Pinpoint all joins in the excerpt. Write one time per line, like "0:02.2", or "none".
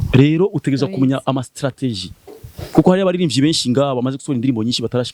none